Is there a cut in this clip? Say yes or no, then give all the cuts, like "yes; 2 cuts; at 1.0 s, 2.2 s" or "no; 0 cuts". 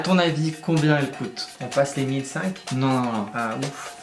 yes; 1 cut; at 1.5 s